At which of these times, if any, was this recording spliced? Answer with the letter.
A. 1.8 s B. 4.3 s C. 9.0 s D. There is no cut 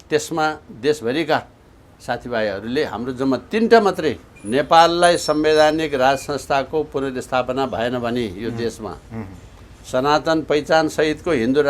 B